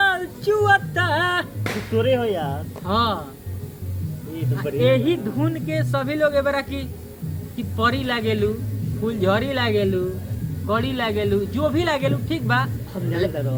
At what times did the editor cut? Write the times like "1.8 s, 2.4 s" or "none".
none